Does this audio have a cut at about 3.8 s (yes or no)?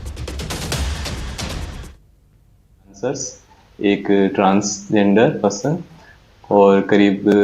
no